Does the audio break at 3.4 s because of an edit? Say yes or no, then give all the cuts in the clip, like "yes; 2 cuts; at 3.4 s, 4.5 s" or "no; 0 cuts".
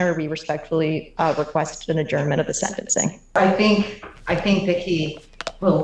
yes; 1 cut; at 3.4 s